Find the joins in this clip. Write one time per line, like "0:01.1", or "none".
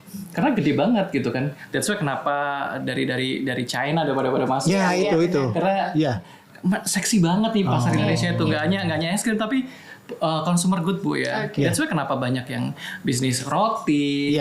none